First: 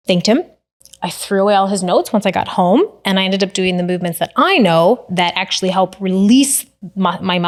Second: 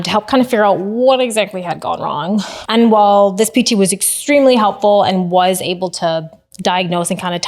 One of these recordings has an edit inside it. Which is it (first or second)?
second